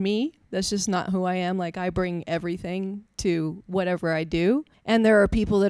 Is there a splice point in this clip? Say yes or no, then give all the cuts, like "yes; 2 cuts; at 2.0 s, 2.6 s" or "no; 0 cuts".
yes; 1 cut; at 4.7 s